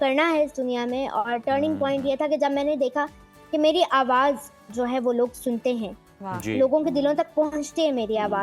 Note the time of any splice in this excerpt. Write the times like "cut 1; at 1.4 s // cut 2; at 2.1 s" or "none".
none